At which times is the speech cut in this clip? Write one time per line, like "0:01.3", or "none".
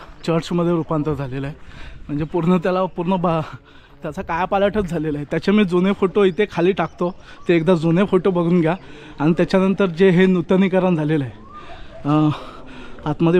0:09.5